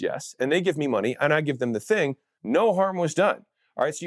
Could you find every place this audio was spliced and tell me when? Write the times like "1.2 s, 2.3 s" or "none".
2.3 s